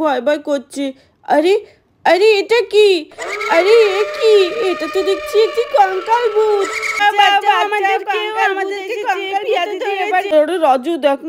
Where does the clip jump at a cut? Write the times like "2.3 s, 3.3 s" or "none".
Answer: 7.0 s, 10.3 s